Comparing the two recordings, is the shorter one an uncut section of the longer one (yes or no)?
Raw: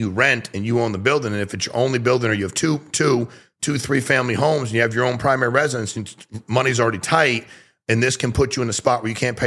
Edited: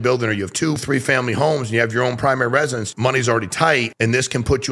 no